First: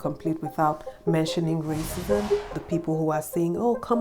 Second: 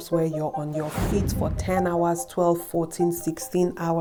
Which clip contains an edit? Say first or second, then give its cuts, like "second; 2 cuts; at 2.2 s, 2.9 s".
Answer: first; 2 cuts; at 0.9 s, 2.6 s